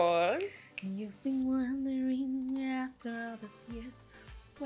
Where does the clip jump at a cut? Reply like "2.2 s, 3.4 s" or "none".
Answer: none